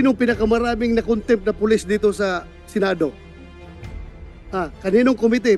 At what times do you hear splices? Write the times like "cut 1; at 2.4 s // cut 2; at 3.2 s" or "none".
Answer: none